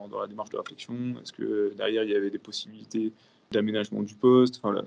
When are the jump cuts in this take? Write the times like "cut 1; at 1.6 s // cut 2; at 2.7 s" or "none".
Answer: cut 1; at 3.5 s